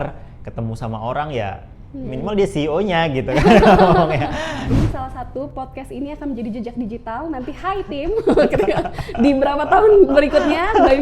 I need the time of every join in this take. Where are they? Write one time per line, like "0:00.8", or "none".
0:04.7